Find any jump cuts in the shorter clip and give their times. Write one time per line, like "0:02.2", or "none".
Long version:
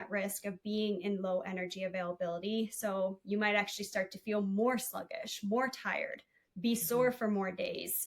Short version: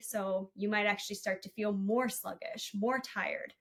none